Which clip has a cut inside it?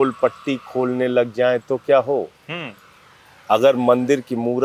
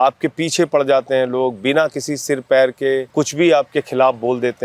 second; 1 cut; at 3.1 s

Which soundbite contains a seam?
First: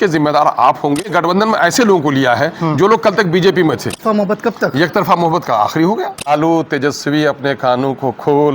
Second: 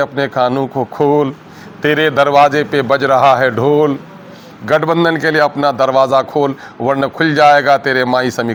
first; 3 cuts; at 1.1 s, 4.0 s, 6.3 s

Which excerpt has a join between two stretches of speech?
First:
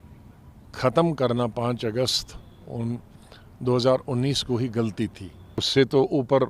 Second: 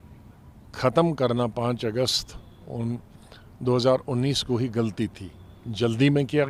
first; 1 cut; at 5.6 s

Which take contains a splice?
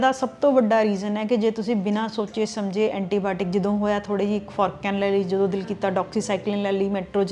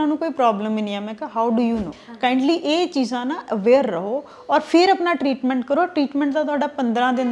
second; 1 cut; at 2.0 s

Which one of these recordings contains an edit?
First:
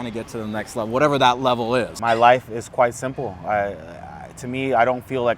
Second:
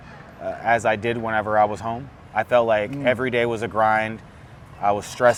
first; 1 cut; at 1.9 s

